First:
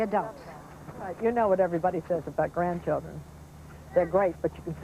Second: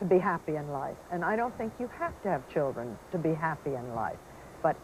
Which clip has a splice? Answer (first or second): first